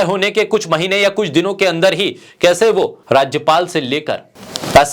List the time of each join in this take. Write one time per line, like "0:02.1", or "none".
0:03.0